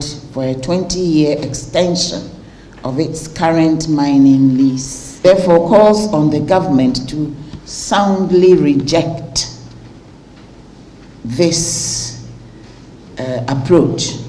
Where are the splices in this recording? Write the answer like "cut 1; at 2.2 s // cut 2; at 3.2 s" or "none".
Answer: cut 1; at 5.2 s